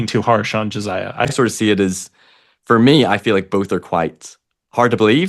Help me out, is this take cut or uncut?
cut